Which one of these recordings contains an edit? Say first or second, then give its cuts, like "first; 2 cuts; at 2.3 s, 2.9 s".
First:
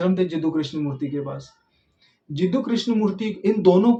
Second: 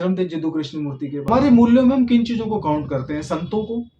second; 1 cut; at 1.3 s